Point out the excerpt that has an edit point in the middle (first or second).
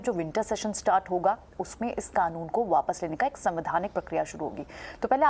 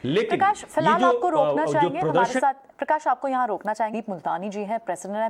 first